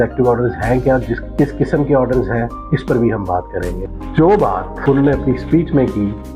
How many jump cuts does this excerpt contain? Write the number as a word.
zero